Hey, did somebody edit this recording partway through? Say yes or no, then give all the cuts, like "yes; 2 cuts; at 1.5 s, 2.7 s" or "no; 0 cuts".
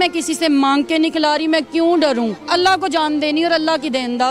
yes; 1 cut; at 2.4 s